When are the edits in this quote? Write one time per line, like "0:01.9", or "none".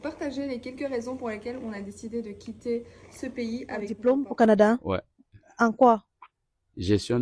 0:03.8